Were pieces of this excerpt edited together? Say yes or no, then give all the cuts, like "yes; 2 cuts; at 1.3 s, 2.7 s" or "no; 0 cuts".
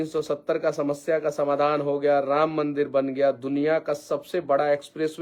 no; 0 cuts